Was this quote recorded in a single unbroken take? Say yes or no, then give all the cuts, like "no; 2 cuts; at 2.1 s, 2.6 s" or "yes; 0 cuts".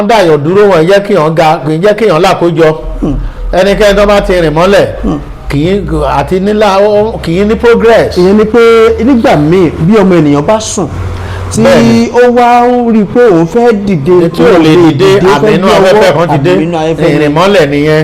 yes; 0 cuts